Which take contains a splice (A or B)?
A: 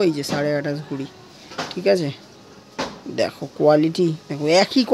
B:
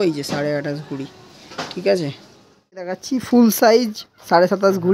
B